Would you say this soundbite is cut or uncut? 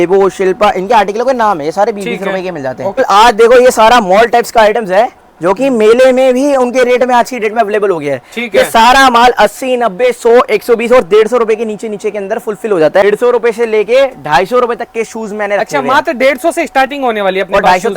cut